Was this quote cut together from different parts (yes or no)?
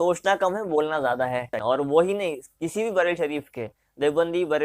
yes